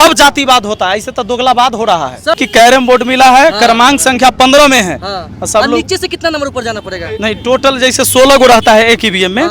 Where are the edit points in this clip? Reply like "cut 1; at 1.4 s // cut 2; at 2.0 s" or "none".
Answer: cut 1; at 2.4 s